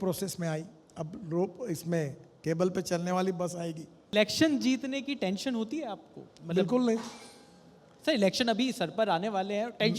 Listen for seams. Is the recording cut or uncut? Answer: cut